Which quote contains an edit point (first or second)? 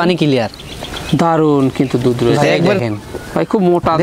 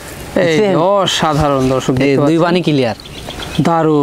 first